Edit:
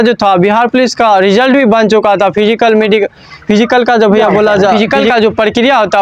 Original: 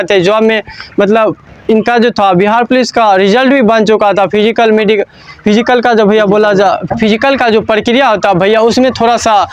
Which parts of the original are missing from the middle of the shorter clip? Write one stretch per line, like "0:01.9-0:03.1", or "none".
0:06.7-0:07.1